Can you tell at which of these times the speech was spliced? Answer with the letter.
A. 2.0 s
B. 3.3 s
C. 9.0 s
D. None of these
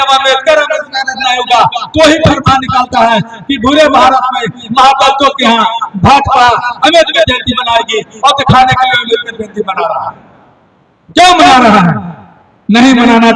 D